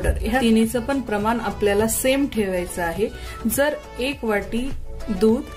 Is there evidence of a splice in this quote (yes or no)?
no